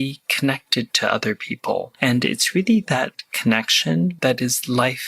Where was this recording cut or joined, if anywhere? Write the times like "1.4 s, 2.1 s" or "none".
1.9 s, 4.2 s